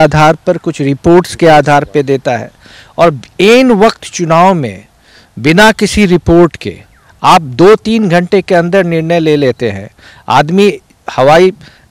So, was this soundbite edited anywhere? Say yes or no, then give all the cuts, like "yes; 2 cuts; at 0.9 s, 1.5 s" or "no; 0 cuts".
no; 0 cuts